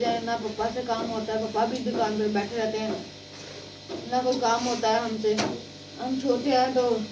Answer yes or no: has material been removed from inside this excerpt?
no